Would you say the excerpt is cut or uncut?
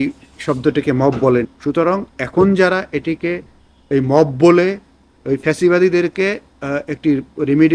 cut